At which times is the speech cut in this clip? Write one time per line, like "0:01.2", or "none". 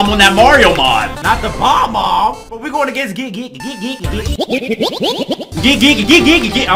0:01.1
0:05.5